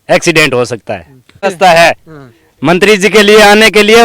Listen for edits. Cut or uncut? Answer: cut